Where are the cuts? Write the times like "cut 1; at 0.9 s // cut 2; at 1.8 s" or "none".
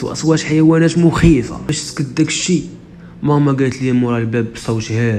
cut 1; at 1.6 s